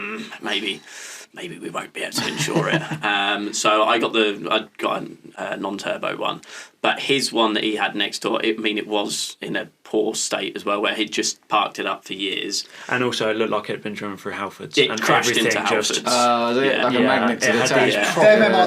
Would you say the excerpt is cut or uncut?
uncut